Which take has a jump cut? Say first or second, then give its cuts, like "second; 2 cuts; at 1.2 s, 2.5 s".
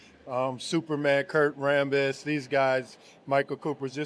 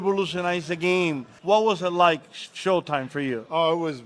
second; 1 cut; at 1.3 s